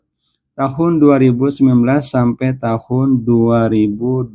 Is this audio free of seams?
yes; 0 cuts

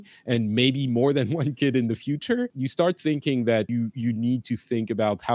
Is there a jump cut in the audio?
yes; 2 cuts; at 2.6 s, 3.7 s

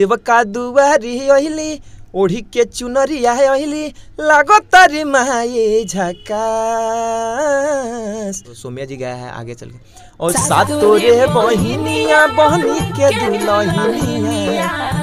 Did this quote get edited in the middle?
no; 0 cuts

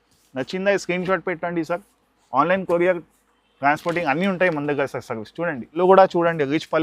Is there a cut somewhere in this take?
yes; 1 cut; at 5.8 s

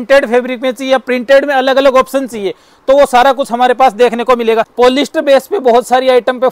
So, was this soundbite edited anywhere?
yes; 1 cut; at 4.7 s

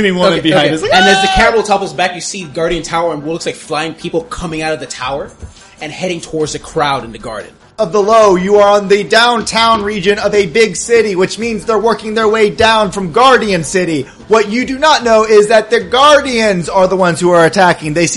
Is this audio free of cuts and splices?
no; 1 cut; at 7.7 s

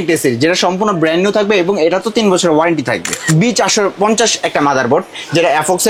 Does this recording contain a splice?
yes; 1 cut; at 3.1 s

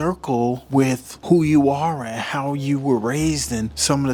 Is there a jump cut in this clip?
no; 0 cuts

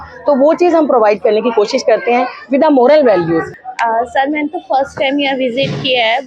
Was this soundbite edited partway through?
yes; 1 cut; at 3.5 s

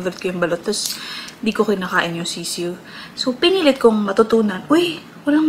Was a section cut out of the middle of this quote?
no; 0 cuts

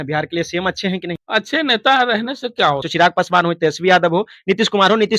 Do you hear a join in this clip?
yes; 2 cuts; at 1.2 s, 2.9 s

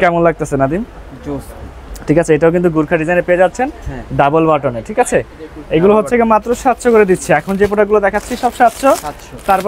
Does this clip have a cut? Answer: no; 0 cuts

